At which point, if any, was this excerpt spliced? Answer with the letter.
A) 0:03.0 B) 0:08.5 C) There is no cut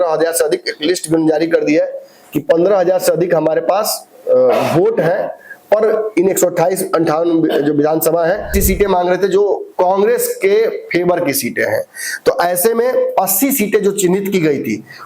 B